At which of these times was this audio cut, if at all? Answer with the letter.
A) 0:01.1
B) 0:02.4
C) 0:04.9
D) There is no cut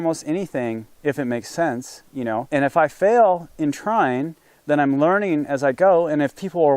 B